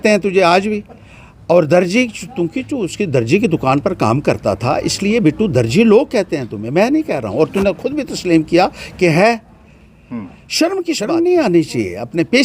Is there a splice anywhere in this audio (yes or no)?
yes